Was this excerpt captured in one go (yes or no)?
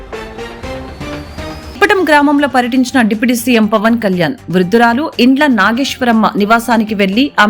yes